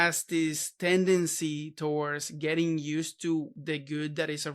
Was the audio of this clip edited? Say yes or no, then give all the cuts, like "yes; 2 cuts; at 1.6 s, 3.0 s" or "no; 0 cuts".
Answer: yes; 1 cut; at 3.6 s